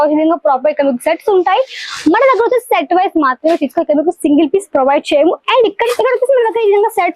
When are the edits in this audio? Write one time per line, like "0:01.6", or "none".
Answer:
0:05.8